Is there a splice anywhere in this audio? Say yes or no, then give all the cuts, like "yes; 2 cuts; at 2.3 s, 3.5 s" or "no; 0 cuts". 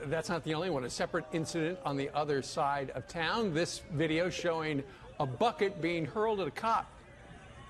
no; 0 cuts